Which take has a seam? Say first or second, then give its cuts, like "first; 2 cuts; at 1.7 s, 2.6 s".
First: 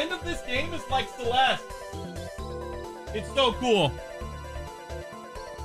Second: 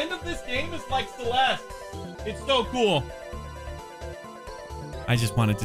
second; 1 cut; at 2.1 s